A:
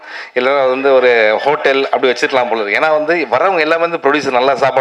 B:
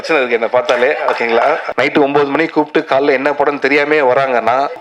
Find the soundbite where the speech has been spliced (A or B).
B